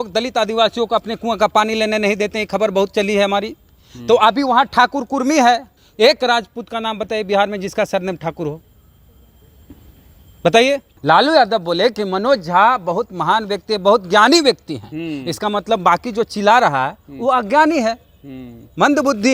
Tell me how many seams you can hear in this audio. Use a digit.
2